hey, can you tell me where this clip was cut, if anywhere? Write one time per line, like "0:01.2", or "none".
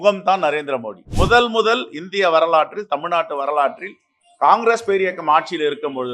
0:01.0